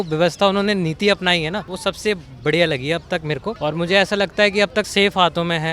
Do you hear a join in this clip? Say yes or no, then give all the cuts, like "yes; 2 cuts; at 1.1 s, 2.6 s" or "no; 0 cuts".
yes; 3 cuts; at 1.7 s, 3.6 s, 4.9 s